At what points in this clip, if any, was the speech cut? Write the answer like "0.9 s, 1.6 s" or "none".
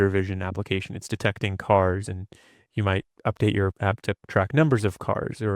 3.1 s, 4.0 s

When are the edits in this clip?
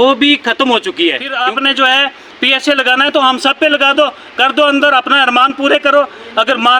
1.4 s

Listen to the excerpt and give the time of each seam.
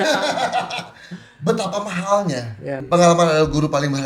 2.8 s

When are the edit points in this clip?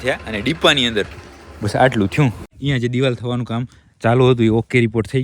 2.5 s

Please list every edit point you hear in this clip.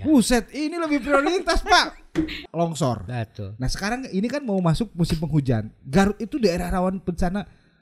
2.4 s

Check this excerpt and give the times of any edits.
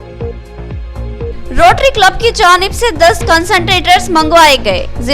1.3 s

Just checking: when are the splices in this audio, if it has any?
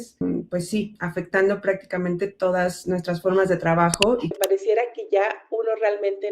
4.4 s

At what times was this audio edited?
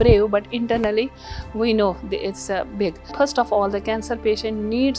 3.0 s

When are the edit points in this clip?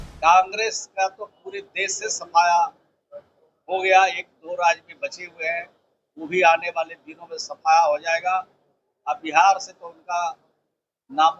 none

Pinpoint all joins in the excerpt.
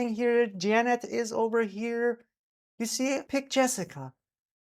3.2 s

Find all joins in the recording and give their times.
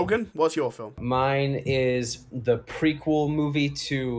0.9 s

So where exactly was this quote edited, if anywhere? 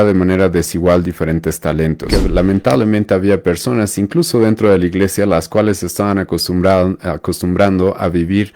2.1 s

